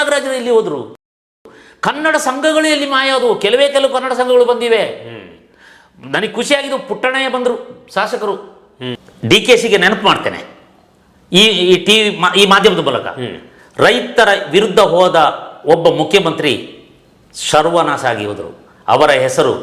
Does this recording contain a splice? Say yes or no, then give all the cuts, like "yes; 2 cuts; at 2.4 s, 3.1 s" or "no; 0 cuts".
yes; 1 cut; at 9.0 s